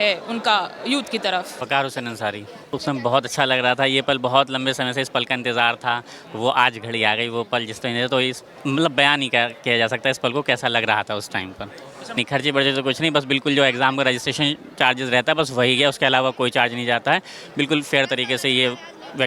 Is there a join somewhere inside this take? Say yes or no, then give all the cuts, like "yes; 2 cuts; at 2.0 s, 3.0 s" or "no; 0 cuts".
yes; 3 cuts; at 1.5 s, 2.8 s, 12.2 s